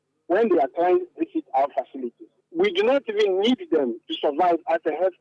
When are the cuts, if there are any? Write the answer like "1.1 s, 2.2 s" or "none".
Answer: 2.4 s